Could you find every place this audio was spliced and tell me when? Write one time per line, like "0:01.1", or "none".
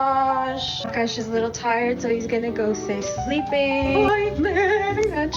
0:03.9